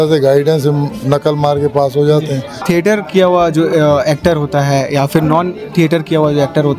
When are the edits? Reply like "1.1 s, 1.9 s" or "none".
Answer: 2.6 s